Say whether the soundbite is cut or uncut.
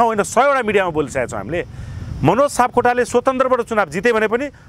uncut